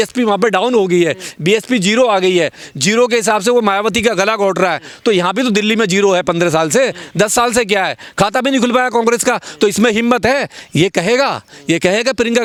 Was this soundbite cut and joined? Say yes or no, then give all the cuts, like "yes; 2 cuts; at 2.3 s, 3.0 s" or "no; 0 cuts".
no; 0 cuts